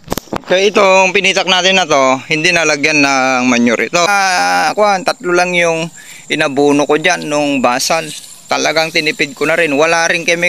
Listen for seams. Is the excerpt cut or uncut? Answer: cut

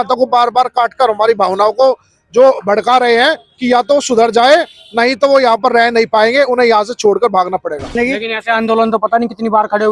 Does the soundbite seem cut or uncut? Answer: cut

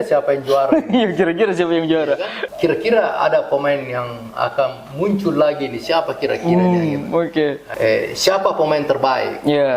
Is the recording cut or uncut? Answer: cut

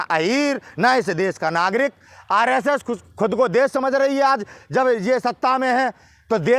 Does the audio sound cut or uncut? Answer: uncut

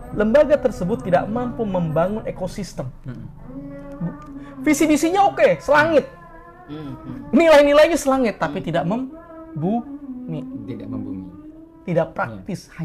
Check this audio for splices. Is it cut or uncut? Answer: uncut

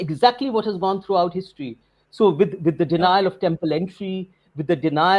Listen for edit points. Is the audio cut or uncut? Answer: uncut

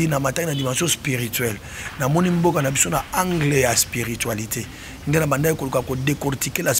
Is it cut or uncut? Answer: uncut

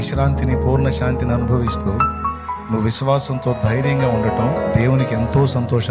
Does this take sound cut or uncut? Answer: uncut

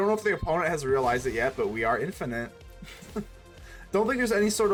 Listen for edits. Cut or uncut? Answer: uncut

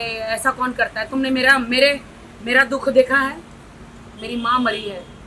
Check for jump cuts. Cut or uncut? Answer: uncut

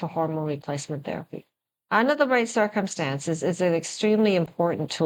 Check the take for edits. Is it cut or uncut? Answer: uncut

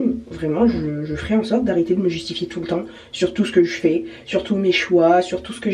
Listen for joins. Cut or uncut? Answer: uncut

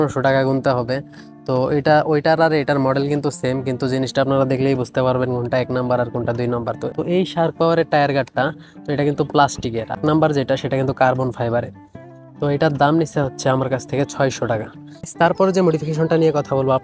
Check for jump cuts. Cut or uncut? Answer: uncut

